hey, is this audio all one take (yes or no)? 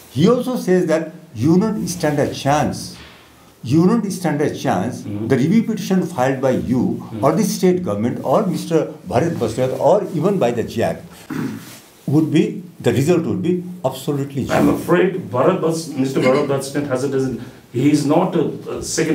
yes